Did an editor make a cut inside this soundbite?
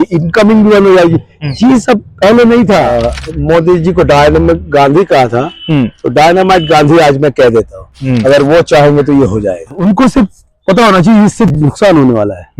yes; 2 cuts; at 2.9 s, 9.8 s

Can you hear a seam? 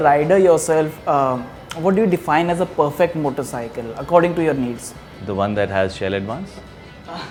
no; 0 cuts

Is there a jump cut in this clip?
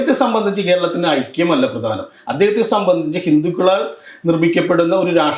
no; 0 cuts

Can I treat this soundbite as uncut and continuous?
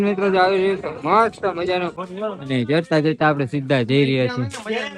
no; 1 cut; at 2.0 s

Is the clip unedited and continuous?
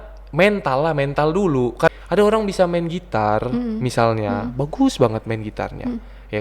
no; 1 cut; at 1.9 s

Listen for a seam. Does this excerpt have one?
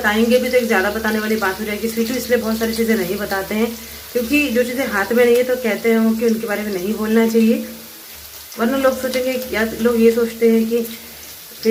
no; 0 cuts

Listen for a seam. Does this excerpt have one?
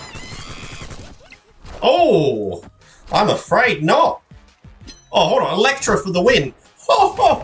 no; 0 cuts

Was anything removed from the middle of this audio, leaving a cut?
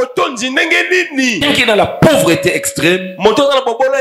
yes; 1 cut; at 1.4 s

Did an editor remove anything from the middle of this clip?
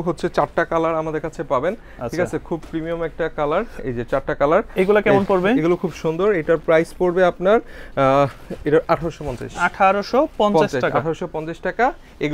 no; 0 cuts

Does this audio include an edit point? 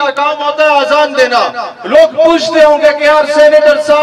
no; 0 cuts

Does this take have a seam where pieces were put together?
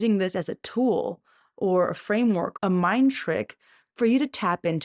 yes; 1 cut; at 2.5 s

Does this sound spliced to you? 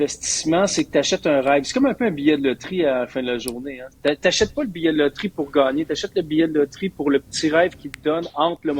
no; 0 cuts

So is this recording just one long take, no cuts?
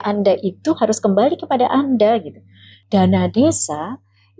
no; 1 cut; at 2.8 s

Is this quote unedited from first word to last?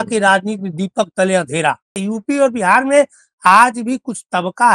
no; 1 cut; at 2.0 s

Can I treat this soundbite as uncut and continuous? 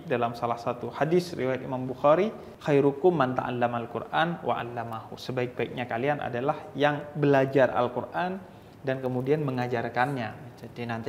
yes; 0 cuts

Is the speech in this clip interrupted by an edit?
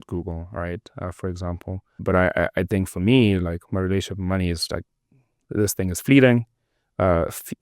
yes; 1 cut; at 2.0 s

